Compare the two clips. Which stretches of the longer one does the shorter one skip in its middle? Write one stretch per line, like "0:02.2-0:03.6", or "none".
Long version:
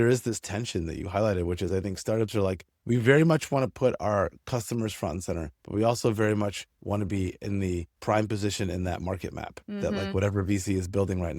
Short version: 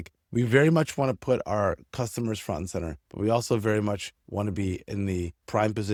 none